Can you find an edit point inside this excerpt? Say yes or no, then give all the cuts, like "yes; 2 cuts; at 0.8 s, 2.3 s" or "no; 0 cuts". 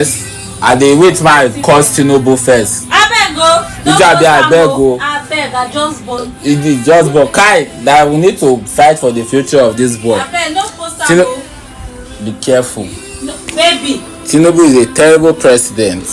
no; 0 cuts